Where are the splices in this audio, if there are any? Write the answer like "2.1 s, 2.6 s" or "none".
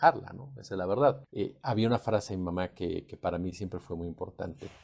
1.3 s